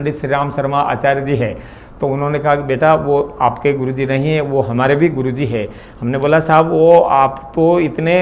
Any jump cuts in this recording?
no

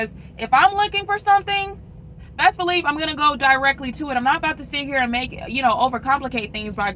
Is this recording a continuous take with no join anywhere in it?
yes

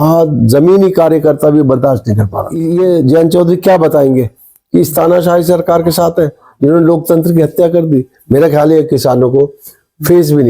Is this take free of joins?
no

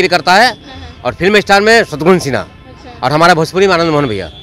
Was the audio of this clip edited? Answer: no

